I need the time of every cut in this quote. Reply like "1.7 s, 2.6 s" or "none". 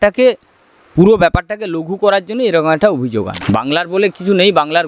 3.4 s